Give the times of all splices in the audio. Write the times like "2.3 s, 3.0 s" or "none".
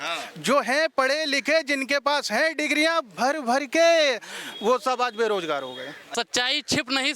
6.1 s

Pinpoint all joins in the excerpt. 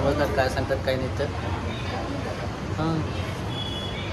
none

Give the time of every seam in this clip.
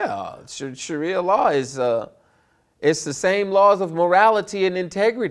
none

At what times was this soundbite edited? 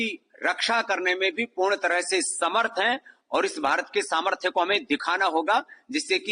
none

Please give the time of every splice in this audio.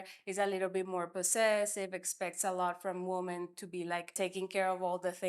4.1 s

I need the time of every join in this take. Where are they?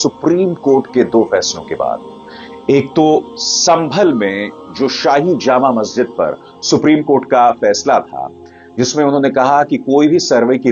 none

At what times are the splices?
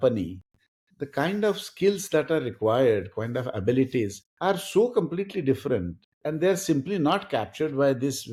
none

